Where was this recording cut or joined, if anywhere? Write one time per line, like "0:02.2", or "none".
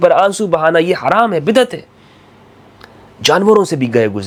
none